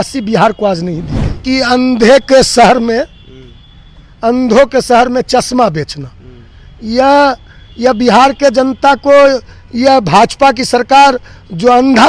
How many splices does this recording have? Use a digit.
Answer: 1